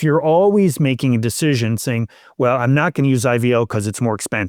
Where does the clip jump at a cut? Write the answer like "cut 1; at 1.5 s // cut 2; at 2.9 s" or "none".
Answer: none